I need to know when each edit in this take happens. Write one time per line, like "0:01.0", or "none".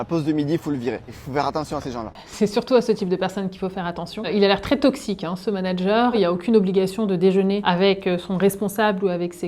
0:01.1
0:02.2
0:06.1
0:07.6